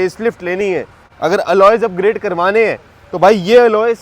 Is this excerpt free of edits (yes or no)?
no